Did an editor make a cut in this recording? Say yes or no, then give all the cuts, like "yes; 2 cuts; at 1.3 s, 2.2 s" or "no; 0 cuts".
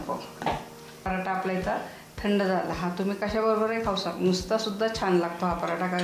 yes; 1 cut; at 1.0 s